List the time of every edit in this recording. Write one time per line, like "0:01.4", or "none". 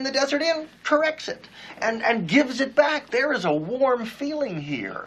none